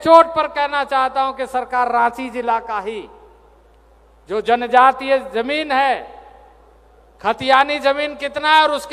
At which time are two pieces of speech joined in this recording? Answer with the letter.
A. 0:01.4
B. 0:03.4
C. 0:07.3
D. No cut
D